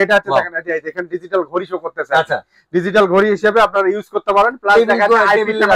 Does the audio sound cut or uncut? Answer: uncut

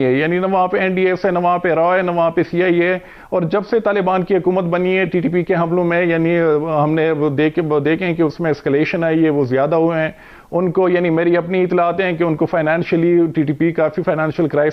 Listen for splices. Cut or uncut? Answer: uncut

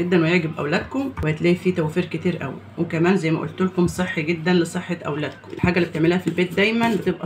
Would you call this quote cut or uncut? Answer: cut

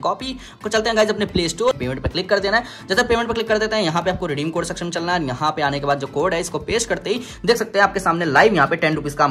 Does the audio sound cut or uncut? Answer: cut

